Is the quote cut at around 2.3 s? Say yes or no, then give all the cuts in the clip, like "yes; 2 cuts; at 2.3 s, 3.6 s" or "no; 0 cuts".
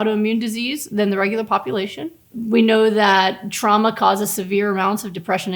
yes; 1 cut; at 2.3 s